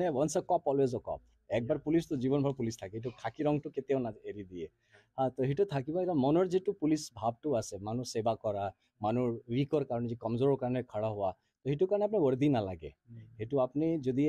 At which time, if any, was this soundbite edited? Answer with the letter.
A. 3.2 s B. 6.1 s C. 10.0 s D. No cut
D